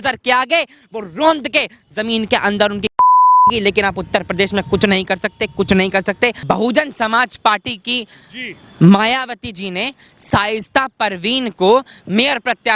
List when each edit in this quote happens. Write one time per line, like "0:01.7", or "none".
0:06.4